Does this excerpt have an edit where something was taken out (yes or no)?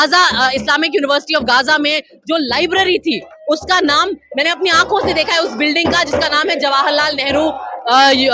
no